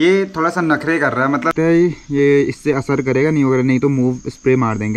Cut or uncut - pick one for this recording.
cut